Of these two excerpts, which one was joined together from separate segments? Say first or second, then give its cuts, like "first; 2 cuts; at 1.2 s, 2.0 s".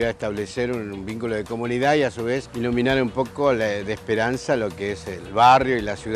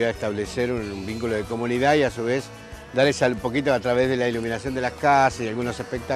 first; 2 cuts; at 2.5 s, 5.2 s